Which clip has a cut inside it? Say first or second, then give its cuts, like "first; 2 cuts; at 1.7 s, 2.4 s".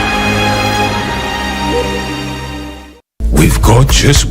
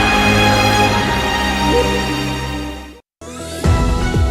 first; 1 cut; at 3.3 s